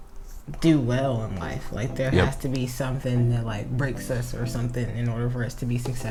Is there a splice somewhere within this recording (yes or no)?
no